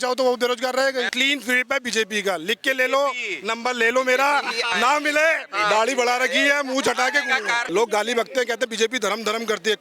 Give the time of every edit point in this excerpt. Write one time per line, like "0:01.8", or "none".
0:01.1
0:07.6

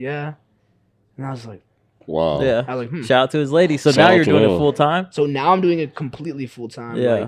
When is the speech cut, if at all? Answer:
0:01.9

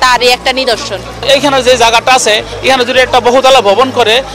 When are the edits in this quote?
0:01.1

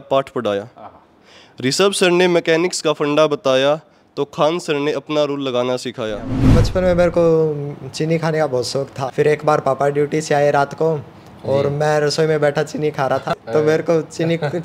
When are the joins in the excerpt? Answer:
0:06.6
0:09.0
0:13.3

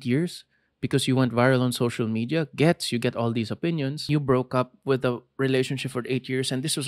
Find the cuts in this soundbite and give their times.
0:04.1

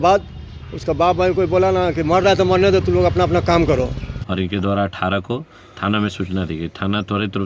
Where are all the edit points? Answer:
0:04.1

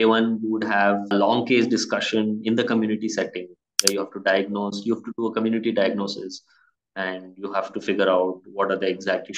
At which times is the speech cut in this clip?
0:01.1

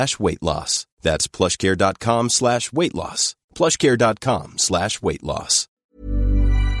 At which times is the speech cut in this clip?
0:05.7

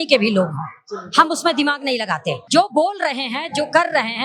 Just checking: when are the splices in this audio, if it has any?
0:02.4

